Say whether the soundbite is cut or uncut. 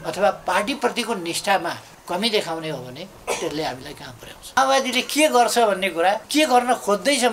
cut